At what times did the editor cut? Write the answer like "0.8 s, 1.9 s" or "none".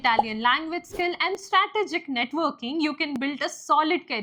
none